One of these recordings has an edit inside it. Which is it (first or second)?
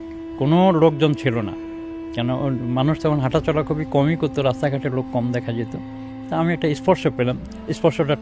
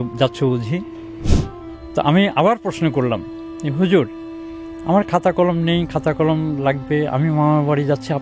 second